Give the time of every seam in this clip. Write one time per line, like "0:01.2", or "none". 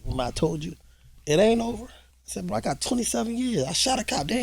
0:02.0